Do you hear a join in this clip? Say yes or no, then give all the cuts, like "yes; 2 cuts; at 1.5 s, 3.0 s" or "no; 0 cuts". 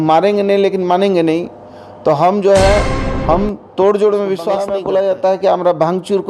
yes; 1 cut; at 4.7 s